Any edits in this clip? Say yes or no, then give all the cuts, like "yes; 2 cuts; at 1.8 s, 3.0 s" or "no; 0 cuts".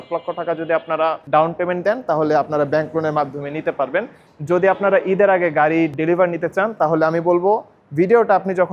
yes; 1 cut; at 1.2 s